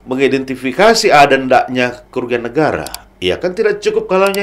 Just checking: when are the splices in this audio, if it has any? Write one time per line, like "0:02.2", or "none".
none